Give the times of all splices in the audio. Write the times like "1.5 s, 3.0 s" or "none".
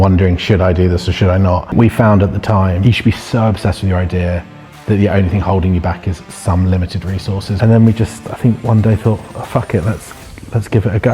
1.7 s, 2.8 s, 7.6 s